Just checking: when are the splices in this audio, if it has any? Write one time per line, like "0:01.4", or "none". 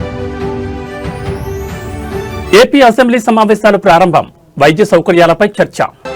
0:01.7

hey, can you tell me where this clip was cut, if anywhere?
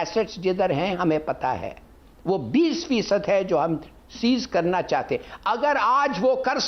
0:04.8

